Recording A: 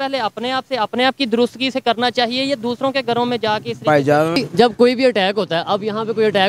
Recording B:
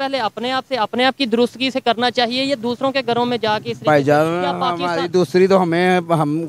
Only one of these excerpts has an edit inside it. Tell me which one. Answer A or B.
A